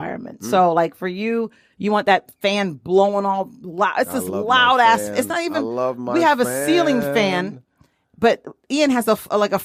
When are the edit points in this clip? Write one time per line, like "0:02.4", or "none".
none